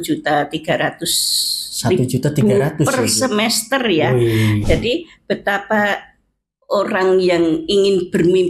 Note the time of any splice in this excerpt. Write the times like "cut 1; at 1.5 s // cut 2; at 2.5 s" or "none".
cut 1; at 4.6 s